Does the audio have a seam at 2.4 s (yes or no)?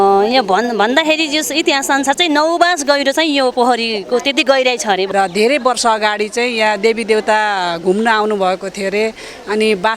no